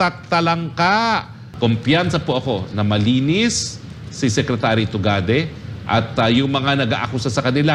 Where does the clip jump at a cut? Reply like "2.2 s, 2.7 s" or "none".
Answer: 1.4 s

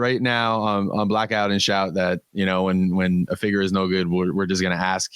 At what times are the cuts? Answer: 2.3 s

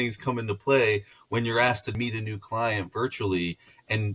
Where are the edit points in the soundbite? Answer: 1.9 s

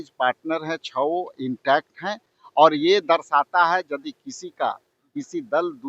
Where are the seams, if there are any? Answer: none

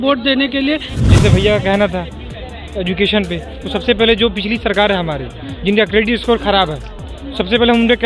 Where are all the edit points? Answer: 0.9 s

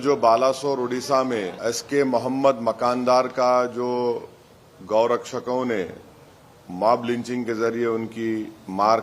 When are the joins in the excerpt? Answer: 1.6 s

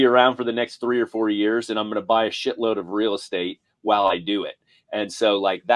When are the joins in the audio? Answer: none

